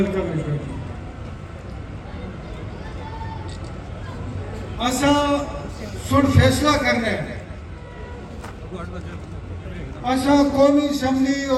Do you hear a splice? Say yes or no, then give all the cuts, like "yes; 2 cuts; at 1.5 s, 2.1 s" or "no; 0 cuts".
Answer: no; 0 cuts